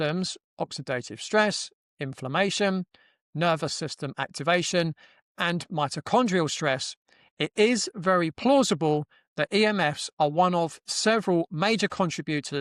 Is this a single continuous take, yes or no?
yes